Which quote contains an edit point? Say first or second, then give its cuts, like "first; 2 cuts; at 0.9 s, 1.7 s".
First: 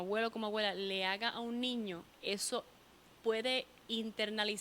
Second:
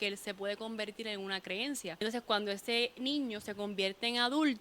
second; 1 cut; at 2.0 s